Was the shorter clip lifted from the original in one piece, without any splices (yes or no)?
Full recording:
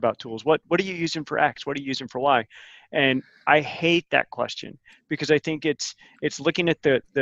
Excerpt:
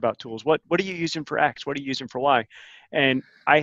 yes